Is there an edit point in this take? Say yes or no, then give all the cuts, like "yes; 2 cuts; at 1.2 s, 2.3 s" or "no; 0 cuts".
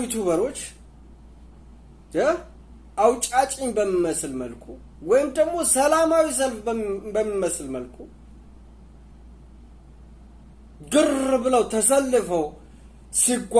yes; 1 cut; at 1.5 s